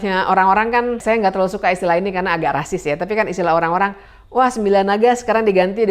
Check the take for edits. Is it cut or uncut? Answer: cut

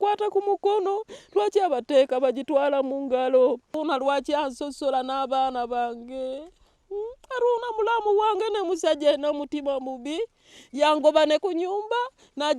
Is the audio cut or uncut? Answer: cut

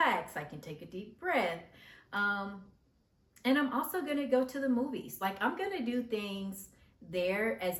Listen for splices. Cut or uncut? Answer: uncut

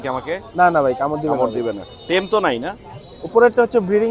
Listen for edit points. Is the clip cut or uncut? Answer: uncut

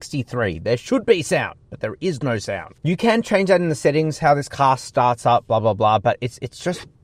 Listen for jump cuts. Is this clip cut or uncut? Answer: uncut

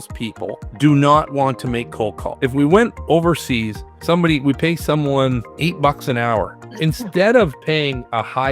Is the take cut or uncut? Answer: cut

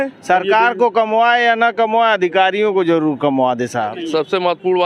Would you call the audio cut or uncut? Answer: cut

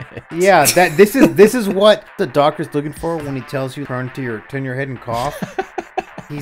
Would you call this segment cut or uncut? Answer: cut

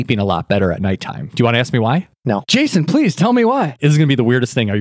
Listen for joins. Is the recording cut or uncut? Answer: cut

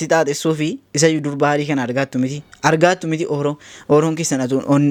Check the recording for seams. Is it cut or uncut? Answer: uncut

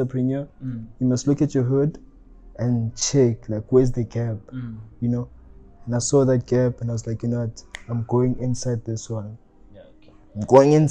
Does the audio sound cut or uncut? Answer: uncut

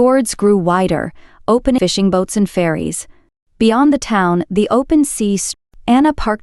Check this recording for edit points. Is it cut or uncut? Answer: cut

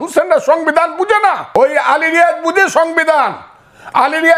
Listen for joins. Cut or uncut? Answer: cut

